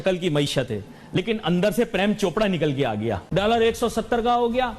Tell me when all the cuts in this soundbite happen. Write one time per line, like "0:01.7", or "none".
0:03.2